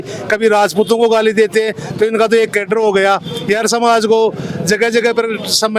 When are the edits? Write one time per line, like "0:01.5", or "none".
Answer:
none